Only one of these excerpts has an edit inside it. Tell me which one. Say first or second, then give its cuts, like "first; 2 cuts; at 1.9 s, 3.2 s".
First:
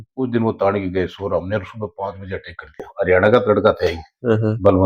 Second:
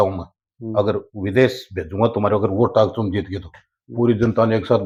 first; 1 cut; at 2.9 s